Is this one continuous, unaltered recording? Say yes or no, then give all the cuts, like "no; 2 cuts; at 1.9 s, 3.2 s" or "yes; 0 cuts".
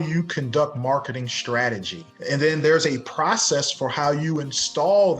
no; 1 cut; at 2.1 s